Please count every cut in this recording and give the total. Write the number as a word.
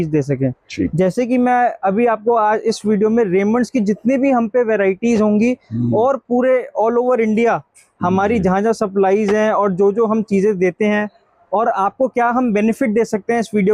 zero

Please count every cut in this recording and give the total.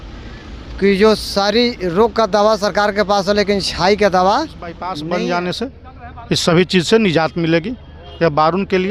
one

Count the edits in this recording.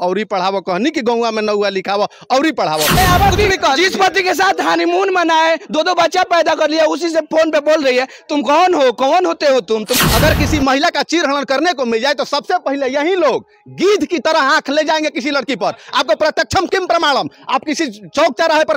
two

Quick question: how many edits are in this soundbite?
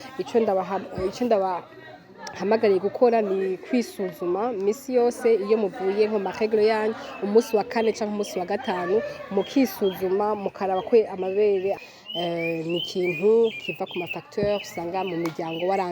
one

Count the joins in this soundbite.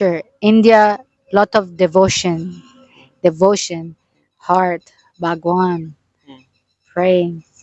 zero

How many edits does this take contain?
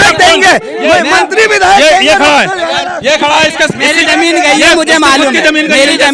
zero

